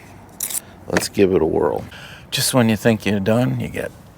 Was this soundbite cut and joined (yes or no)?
yes